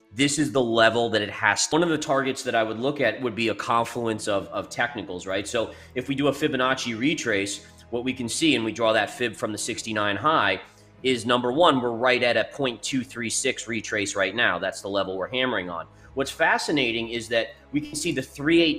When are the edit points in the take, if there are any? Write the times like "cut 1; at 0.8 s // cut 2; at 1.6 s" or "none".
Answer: cut 1; at 1.6 s